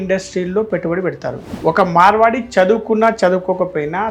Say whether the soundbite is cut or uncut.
cut